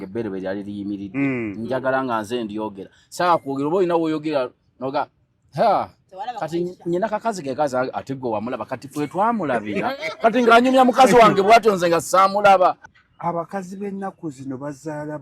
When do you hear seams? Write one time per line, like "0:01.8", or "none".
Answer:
0:12.8